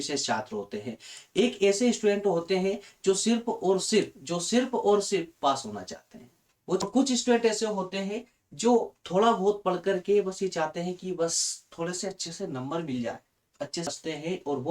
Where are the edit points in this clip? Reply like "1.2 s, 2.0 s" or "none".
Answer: 6.8 s, 13.9 s